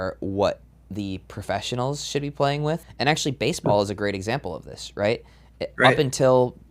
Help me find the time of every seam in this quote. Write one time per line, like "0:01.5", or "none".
0:02.9